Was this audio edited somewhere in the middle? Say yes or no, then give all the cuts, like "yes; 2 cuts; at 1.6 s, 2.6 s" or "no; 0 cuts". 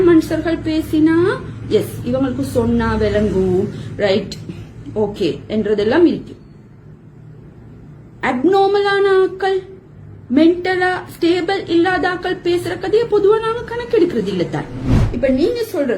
yes; 1 cut; at 14.9 s